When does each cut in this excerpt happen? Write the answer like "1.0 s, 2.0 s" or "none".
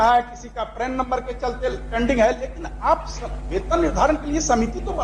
none